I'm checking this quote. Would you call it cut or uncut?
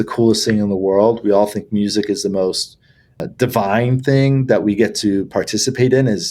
uncut